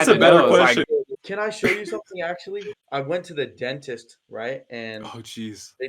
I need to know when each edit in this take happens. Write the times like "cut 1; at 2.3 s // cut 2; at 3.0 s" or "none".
cut 1; at 1.2 s // cut 2; at 2.7 s

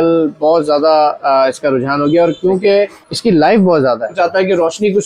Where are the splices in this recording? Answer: cut 1; at 3.0 s // cut 2; at 4.1 s

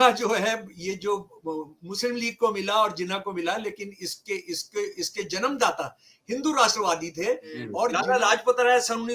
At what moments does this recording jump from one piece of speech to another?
cut 1; at 7.9 s

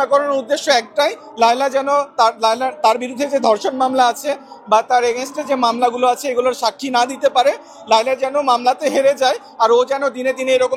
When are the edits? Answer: none

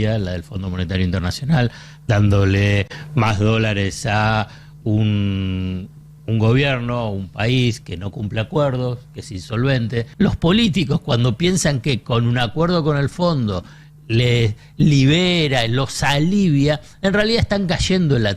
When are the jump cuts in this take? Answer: cut 1; at 10.1 s

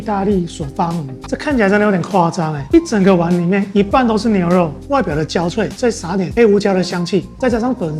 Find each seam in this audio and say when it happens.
cut 1; at 1.1 s // cut 2; at 4.8 s

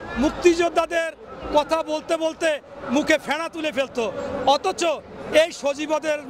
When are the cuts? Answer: none

